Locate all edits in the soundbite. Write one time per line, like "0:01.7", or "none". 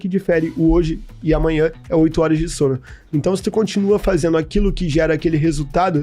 none